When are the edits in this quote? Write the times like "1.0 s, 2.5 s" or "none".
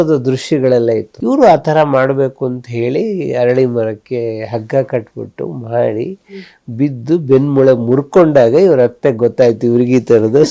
1.1 s